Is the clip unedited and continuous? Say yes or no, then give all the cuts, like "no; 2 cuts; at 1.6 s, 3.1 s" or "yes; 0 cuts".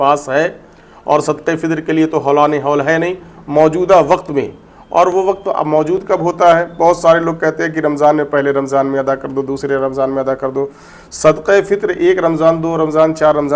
yes; 0 cuts